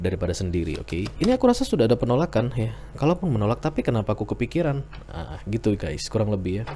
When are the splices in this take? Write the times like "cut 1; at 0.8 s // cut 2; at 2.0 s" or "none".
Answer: cut 1; at 1.1 s